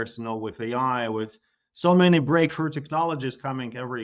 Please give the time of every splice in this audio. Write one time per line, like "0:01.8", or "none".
none